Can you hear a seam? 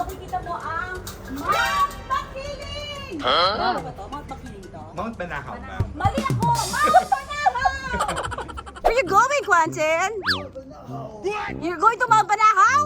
yes; 1 cut; at 8.9 s

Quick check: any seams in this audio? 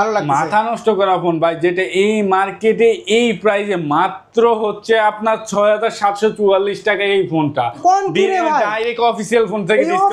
yes; 1 cut; at 7.8 s

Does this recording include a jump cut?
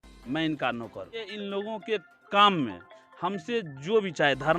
yes; 2 cuts; at 1.3 s, 2.2 s

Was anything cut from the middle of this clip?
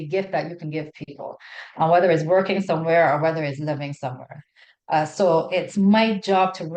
no; 0 cuts

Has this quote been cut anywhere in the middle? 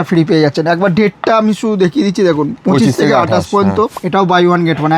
yes; 1 cut; at 4.0 s

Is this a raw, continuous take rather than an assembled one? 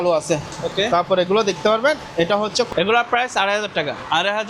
no; 1 cut; at 2.7 s

